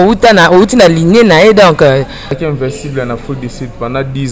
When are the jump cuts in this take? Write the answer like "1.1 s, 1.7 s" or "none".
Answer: 2.4 s